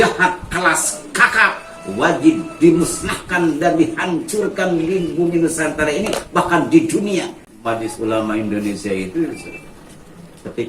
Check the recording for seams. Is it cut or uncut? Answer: cut